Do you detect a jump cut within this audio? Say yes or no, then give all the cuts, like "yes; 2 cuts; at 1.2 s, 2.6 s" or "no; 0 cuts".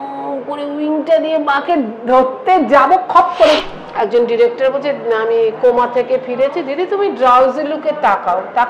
yes; 1 cut; at 3.6 s